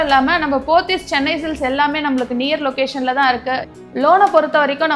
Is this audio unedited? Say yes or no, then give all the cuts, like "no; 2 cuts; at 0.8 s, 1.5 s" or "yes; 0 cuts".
no; 1 cut; at 3.7 s